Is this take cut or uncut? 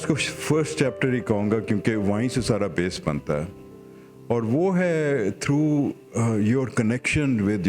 uncut